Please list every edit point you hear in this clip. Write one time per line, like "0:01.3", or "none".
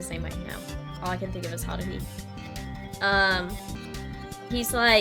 0:03.8